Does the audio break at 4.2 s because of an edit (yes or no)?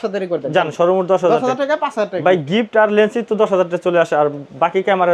no